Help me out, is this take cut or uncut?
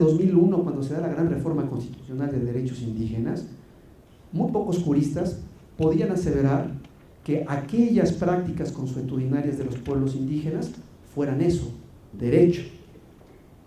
uncut